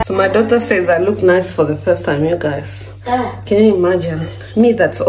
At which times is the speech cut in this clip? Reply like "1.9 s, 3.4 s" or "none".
none